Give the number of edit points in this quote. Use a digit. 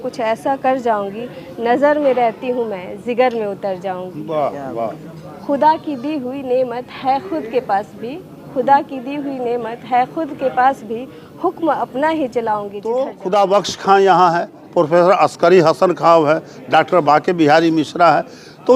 1